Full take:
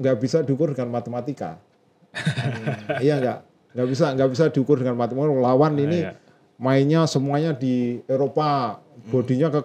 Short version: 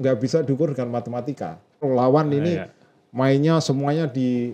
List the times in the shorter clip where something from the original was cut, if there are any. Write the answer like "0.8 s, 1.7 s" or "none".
1.8 s

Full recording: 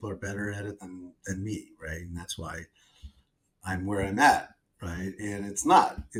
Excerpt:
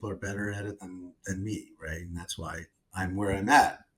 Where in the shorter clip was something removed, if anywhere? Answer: 2.8 s

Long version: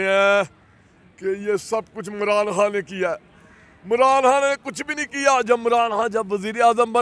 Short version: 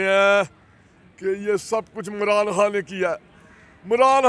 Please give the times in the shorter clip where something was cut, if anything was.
none

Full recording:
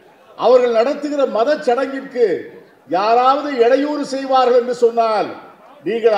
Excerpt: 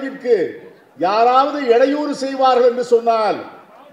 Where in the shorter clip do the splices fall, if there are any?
none

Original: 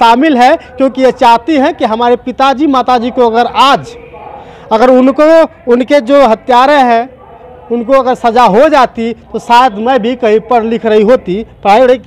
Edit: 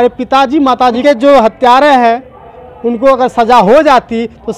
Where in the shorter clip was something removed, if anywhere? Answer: 1.0 s

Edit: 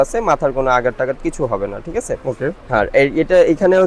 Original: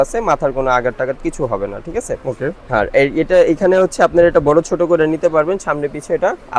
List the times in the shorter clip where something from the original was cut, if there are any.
none

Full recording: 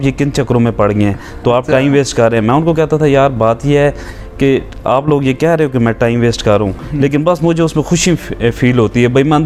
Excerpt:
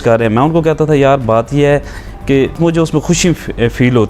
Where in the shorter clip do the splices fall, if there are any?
2.6 s

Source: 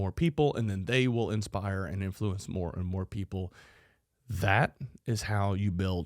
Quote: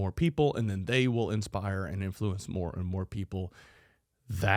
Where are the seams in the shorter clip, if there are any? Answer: none

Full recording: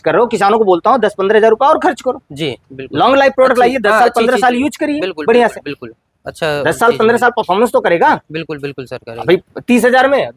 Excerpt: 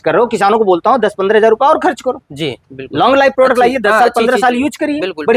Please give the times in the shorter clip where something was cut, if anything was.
none

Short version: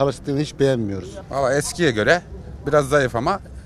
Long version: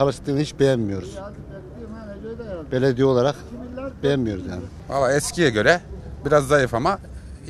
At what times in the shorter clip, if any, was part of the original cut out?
1.1 s

